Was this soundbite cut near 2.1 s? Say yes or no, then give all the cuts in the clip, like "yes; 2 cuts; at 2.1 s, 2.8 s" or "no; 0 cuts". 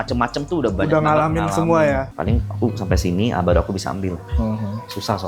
yes; 1 cut; at 2.1 s